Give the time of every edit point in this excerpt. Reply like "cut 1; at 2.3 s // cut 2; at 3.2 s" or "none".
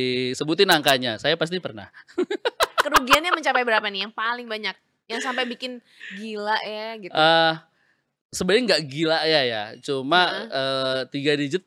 none

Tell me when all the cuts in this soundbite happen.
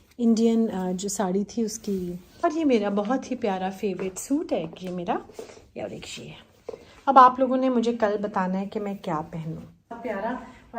cut 1; at 2.4 s // cut 2; at 10.0 s

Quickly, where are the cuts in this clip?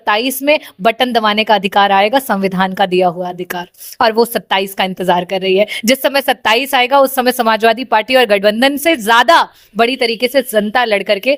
none

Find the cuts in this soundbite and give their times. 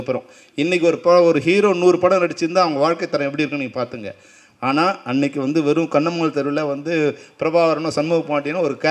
none

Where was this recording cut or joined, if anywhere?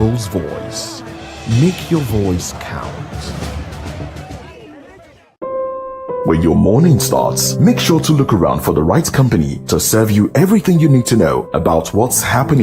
cut 1; at 5.4 s

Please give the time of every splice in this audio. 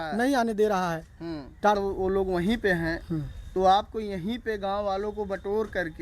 cut 1; at 1.8 s

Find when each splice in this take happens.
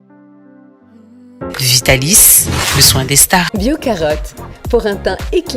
cut 1; at 1.2 s

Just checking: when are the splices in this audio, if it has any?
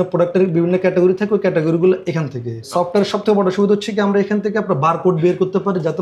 cut 1; at 2.7 s

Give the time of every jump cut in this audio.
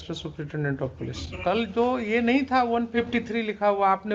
cut 1; at 1.3 s

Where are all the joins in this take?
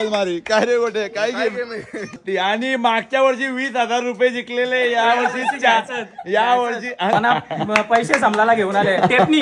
cut 1; at 2.2 s // cut 2; at 7.1 s

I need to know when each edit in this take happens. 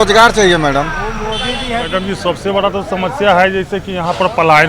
cut 1; at 1.9 s

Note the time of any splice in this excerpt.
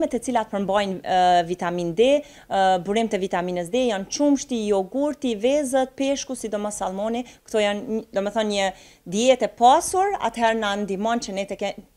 none

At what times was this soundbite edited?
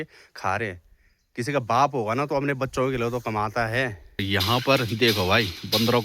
cut 1; at 4.2 s

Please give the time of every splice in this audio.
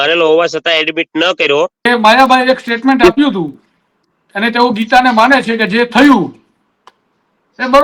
cut 1; at 1.8 s

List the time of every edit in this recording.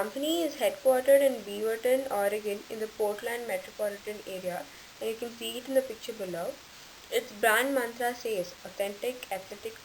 none

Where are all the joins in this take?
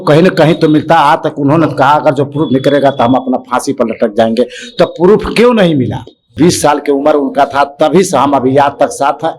cut 1; at 6.3 s

